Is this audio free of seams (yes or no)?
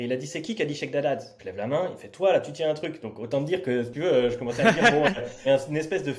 no